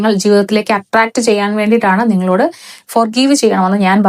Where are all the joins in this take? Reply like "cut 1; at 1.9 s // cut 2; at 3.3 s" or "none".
none